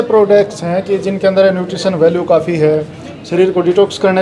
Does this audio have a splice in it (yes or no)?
no